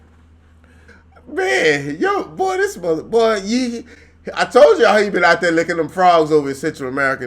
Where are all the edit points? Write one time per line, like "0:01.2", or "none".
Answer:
0:01.0

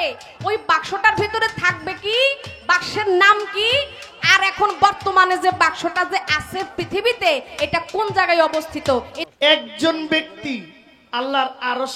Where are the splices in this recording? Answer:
0:09.2

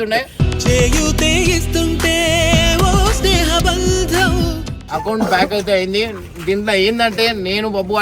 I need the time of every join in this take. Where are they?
0:04.8

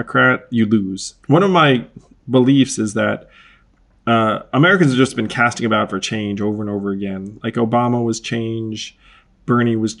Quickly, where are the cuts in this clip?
0:01.1

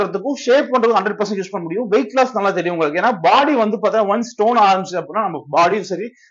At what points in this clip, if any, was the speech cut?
none

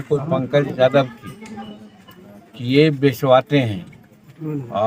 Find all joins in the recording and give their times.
none

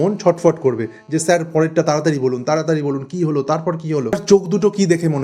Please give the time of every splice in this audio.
0:04.1

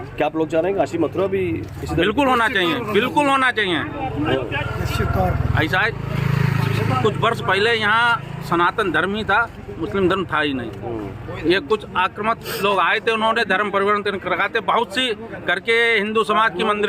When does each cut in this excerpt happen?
none

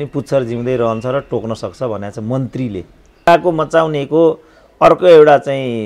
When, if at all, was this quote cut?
0:03.3

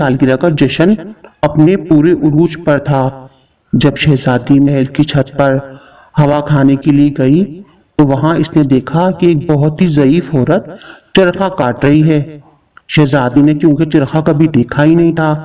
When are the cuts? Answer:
none

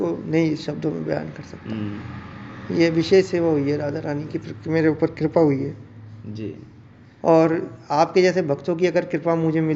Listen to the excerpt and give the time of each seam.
none

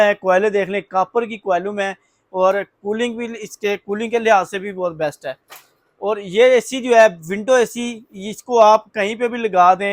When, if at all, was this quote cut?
none

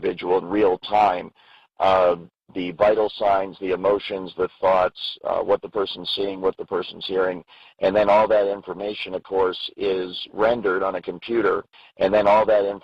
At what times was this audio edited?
0:11.8

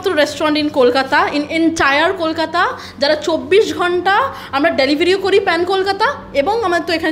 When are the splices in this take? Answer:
none

